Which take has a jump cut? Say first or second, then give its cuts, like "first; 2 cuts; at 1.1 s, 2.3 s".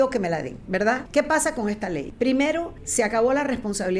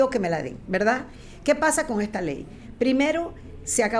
first; 3 cuts; at 1.0 s, 2.1 s, 2.8 s